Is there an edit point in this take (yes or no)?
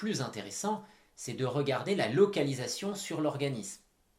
no